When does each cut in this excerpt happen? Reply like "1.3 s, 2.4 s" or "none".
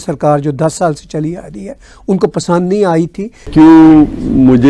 3.5 s